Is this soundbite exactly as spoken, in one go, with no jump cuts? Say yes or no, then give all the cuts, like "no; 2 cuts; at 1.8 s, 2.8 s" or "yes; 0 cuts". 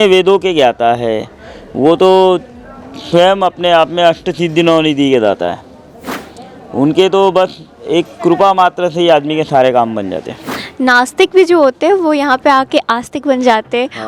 no; 1 cut; at 10.3 s